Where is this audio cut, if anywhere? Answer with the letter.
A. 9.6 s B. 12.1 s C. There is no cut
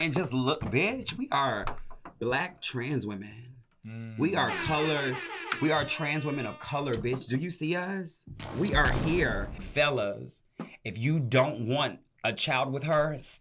A